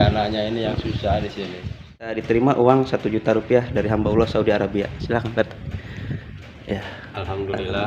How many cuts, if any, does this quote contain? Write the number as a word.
one